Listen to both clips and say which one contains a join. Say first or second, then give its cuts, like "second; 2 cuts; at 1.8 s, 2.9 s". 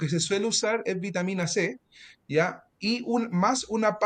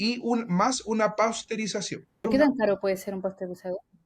second; 1 cut; at 2.3 s